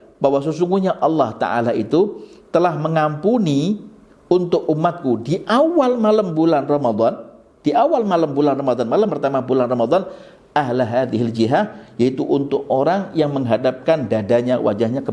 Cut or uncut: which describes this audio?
uncut